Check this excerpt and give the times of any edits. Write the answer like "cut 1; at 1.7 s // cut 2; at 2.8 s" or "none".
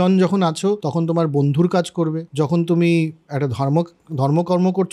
cut 1; at 0.8 s // cut 2; at 2.2 s